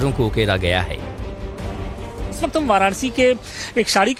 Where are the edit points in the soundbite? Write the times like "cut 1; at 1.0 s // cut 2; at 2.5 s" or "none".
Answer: none